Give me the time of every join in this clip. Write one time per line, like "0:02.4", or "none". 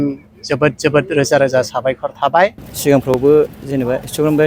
0:02.7